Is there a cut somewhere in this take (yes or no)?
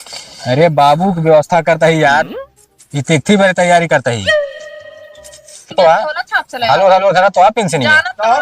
yes